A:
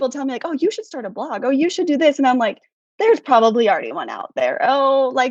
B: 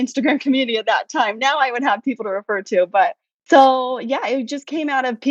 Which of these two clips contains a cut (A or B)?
B